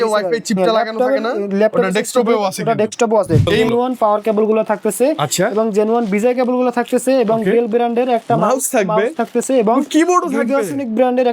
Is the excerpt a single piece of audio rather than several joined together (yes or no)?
no